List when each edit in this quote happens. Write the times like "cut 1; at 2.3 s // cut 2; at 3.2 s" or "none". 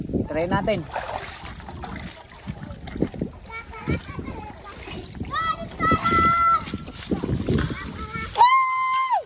none

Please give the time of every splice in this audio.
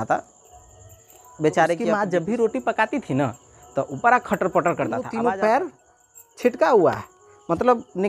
cut 1; at 2.0 s // cut 2; at 5.1 s

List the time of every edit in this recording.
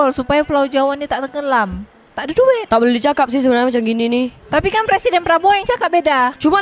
cut 1; at 2.6 s

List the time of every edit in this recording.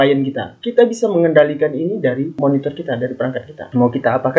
none

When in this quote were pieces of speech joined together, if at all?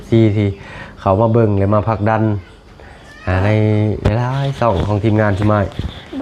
none

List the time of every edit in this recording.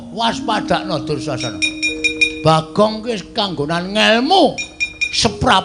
none

